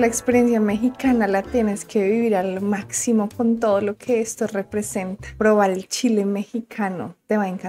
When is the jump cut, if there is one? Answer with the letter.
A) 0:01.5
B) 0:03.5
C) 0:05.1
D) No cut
D